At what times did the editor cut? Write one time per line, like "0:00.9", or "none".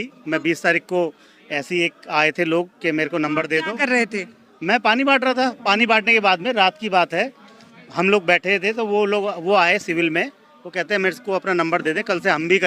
none